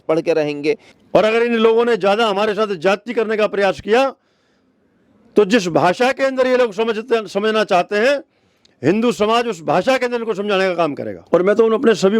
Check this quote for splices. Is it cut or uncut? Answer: cut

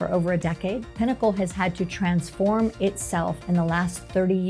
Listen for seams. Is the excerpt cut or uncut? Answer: cut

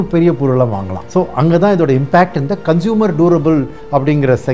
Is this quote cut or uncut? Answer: uncut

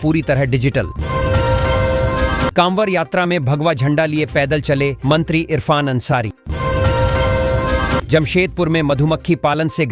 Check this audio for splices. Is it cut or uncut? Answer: cut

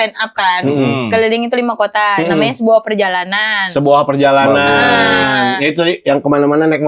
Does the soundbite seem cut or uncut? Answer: uncut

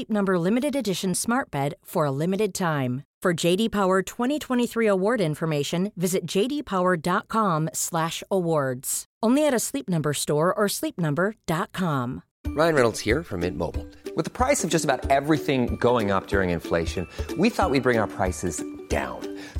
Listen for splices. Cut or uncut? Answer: uncut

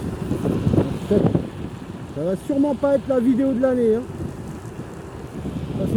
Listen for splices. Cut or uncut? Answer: uncut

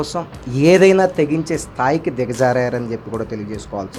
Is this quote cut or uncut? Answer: uncut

